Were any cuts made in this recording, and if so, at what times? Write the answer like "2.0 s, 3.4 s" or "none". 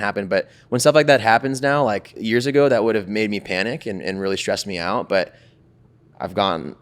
2.1 s